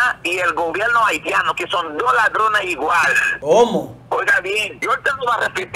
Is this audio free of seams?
no; 2 cuts; at 3.2 s, 4.7 s

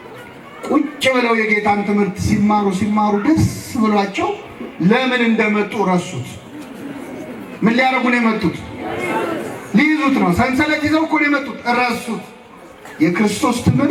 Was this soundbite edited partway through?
no; 0 cuts

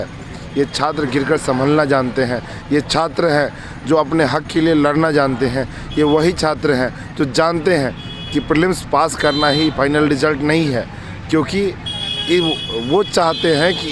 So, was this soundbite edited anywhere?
no; 0 cuts

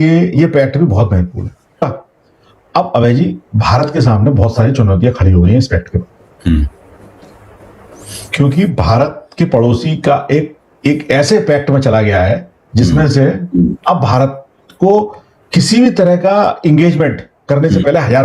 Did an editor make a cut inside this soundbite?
yes; 1 cut; at 1.8 s

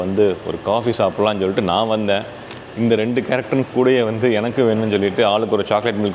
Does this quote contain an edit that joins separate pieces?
no; 0 cuts

